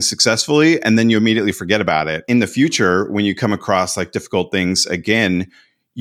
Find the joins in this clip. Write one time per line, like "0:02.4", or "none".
0:02.2